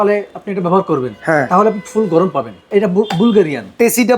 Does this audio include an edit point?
yes; 1 cut; at 2.6 s

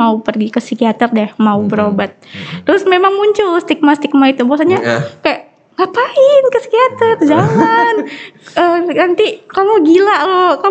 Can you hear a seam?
no; 0 cuts

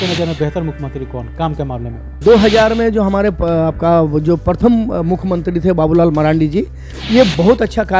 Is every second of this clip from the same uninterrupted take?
no; 1 cut; at 2.2 s

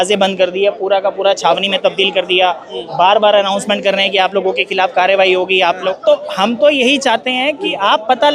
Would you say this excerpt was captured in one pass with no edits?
no; 1 cut; at 5.9 s

